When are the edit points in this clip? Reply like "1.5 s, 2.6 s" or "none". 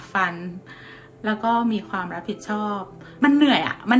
3.0 s